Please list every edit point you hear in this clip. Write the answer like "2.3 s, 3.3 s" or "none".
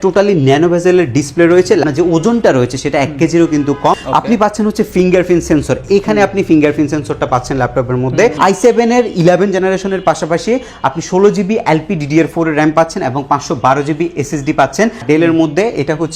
1.8 s, 4.0 s, 8.3 s, 15.0 s

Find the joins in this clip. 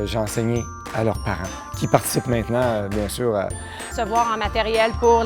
none

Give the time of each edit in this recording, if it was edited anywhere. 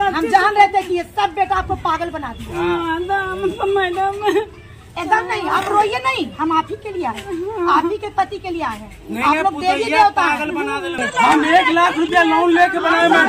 11.0 s

